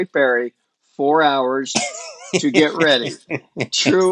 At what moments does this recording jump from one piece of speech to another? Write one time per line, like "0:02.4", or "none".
none

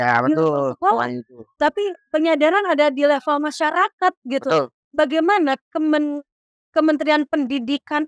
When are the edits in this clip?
none

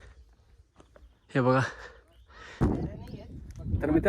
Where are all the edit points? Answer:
0:02.6

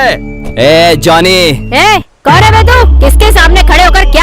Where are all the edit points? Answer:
0:01.6

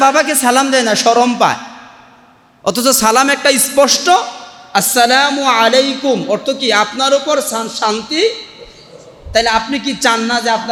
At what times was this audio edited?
none

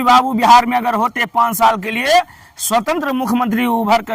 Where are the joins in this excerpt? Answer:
none

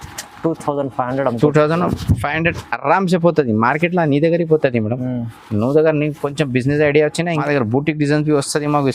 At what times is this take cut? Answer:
0:07.4

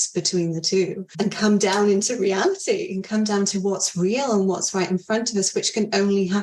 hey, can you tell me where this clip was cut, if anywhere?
0:01.1

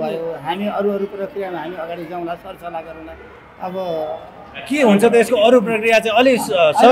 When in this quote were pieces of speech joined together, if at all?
none

